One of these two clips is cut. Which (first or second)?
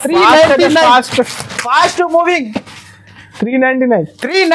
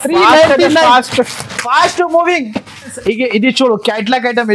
second